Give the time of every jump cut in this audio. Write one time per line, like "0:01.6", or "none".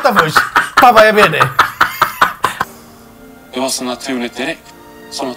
0:02.6